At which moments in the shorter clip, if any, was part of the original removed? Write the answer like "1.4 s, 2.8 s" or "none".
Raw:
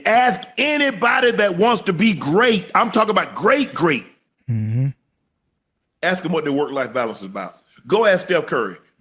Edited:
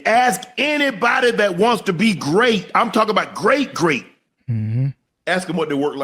5.1 s